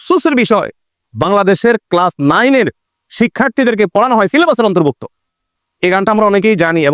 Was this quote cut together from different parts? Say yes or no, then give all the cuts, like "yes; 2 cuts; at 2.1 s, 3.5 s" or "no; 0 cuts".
no; 0 cuts